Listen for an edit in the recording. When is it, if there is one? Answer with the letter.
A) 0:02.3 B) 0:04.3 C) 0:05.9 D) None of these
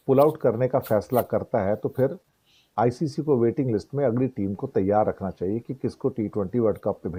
D